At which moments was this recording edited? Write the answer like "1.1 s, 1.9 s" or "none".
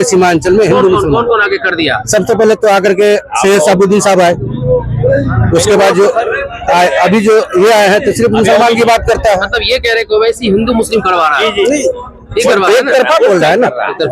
none